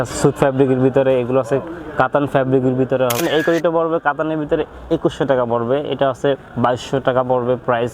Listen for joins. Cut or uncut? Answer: cut